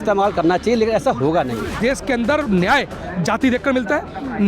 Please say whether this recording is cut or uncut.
cut